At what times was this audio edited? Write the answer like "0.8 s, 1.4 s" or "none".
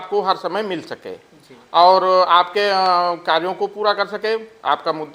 none